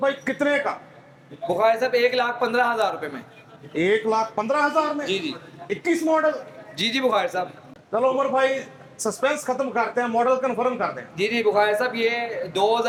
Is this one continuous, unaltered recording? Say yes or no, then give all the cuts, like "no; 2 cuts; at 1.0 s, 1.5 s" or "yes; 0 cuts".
yes; 0 cuts